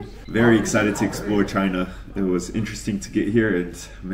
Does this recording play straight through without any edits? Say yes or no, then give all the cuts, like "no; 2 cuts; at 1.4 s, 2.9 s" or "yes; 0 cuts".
yes; 0 cuts